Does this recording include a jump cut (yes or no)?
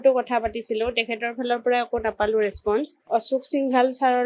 yes